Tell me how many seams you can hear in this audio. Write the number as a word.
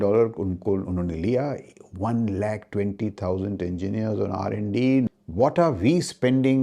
one